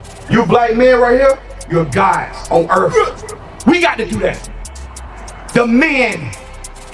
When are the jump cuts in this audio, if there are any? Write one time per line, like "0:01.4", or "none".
0:02.9